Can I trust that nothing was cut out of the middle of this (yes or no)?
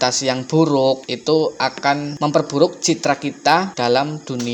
yes